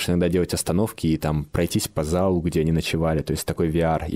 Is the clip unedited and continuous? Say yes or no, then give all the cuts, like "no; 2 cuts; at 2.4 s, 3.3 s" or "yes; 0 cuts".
yes; 0 cuts